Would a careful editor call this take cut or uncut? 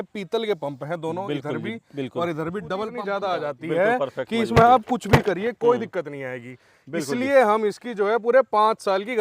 cut